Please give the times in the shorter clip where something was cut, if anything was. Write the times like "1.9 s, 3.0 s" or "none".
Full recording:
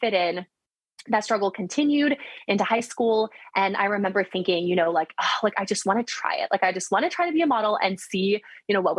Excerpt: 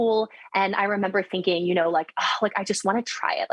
none